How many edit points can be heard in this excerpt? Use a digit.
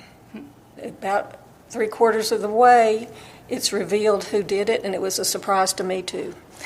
0